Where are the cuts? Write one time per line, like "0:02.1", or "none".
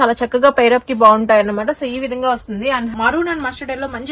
0:02.9